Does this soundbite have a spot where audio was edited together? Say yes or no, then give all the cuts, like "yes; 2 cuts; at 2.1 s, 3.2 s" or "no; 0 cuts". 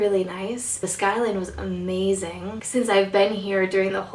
yes; 1 cut; at 2.6 s